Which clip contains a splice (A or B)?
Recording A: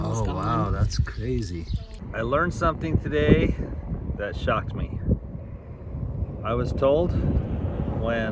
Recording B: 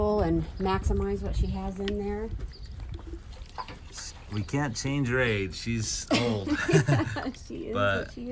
A